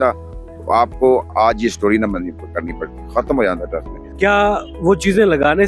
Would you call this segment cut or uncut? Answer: cut